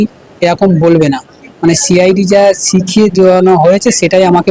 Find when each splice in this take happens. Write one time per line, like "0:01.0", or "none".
none